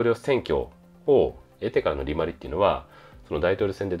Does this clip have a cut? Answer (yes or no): no